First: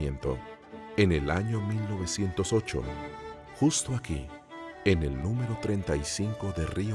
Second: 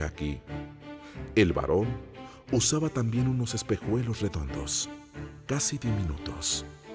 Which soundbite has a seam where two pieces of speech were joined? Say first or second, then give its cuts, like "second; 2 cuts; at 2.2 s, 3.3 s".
first; 1 cut; at 1.1 s